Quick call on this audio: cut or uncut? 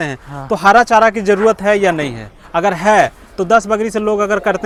uncut